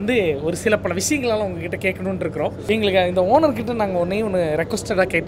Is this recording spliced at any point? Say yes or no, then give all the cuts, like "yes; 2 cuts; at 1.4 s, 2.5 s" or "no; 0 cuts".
yes; 1 cut; at 2.6 s